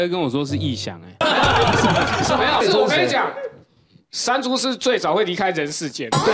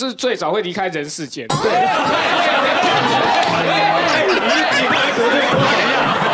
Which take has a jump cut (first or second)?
first